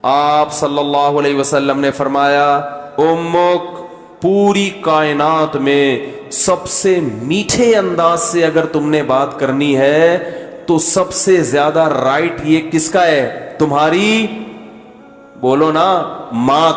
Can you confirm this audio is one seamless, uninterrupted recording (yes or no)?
yes